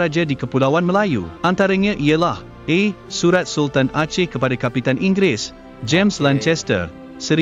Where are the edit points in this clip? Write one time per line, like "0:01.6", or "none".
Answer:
0:01.3